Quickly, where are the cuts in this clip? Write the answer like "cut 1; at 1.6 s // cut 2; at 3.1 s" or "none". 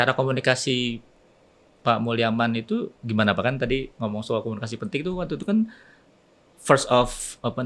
none